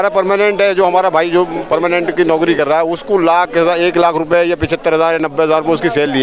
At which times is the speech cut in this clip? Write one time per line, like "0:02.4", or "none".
none